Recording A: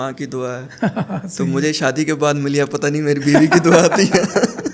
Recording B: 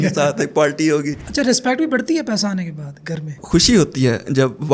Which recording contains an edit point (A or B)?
B